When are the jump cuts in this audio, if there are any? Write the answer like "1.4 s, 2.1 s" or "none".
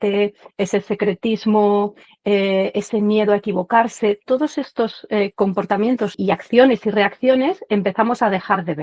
6.1 s